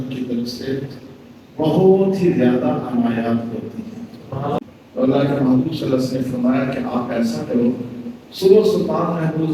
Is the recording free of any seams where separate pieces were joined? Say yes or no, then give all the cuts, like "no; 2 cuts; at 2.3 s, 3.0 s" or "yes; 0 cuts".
no; 1 cut; at 4.6 s